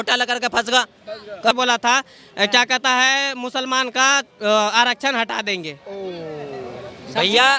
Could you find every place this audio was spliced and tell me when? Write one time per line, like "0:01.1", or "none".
0:01.5